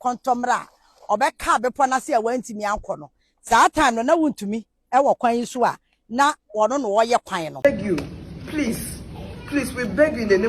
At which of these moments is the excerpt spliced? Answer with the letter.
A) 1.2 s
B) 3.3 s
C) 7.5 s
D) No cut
C